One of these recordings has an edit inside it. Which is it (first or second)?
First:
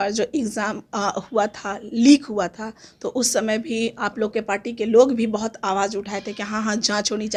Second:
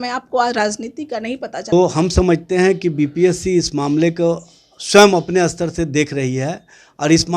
second